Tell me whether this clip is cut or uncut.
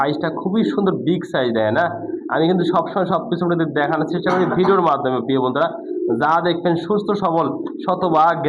uncut